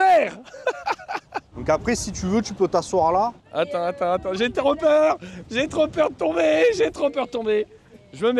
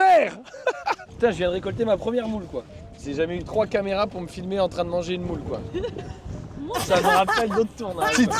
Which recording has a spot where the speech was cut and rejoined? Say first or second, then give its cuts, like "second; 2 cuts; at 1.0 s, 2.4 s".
second; 3 cuts; at 1.1 s, 3.0 s, 5.7 s